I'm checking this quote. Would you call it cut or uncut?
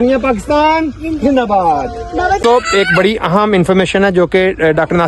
uncut